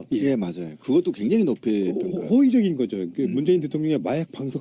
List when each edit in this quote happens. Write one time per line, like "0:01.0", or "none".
none